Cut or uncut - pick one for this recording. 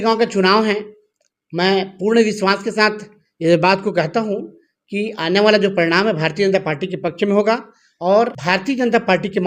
cut